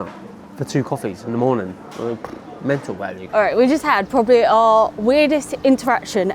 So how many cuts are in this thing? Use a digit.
1